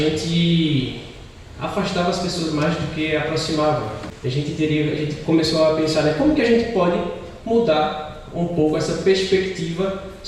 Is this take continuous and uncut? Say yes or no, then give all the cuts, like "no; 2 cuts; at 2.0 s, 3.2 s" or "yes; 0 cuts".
no; 1 cut; at 4.1 s